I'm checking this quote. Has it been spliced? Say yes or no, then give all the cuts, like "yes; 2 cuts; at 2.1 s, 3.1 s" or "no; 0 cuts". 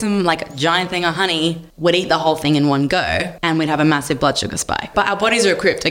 yes; 3 cuts; at 1.7 s, 3.3 s, 4.9 s